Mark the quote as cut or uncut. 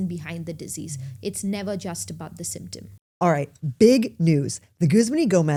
uncut